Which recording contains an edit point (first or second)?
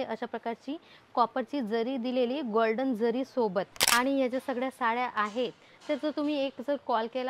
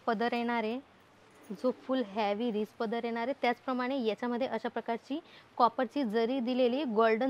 first